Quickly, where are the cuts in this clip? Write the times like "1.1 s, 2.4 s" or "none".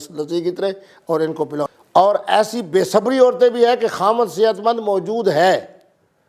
1.7 s